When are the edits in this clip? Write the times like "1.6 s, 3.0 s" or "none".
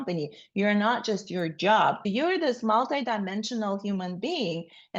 2.0 s